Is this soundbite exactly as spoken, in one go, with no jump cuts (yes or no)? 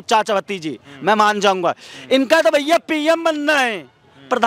yes